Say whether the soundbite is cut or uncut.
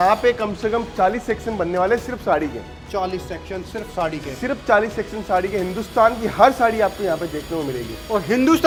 uncut